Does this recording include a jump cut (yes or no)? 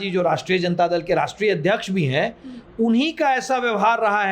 no